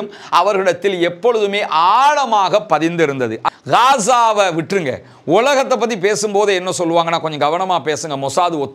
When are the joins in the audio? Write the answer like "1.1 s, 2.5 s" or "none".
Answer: 3.4 s

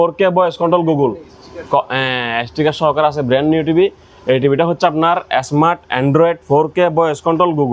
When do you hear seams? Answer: none

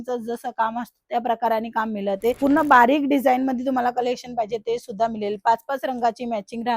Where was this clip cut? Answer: 2.4 s

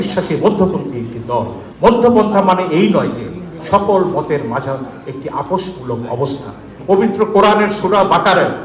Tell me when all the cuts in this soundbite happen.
1.6 s, 6.7 s

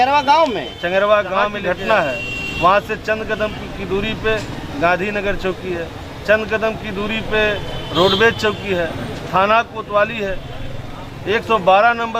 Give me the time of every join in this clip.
1.6 s

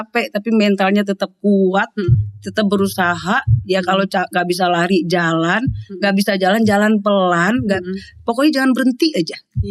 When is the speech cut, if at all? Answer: none

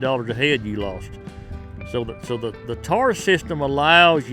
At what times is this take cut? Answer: none

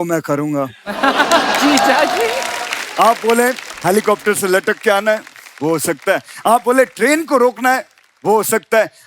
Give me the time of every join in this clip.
none

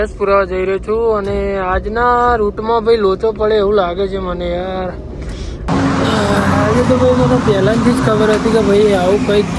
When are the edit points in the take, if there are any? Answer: 5.5 s

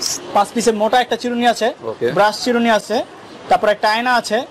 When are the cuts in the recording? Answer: none

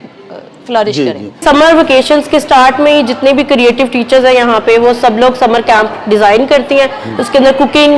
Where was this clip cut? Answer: 1.4 s

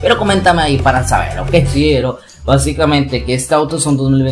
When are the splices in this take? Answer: 1.7 s

